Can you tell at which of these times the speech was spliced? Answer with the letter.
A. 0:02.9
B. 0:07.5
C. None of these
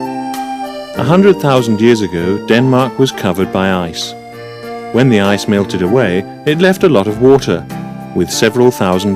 B